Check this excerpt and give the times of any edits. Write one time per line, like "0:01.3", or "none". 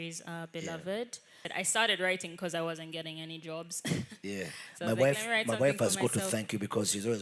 0:01.4